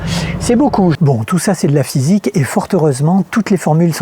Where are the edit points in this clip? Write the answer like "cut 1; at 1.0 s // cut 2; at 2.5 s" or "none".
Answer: cut 1; at 1.0 s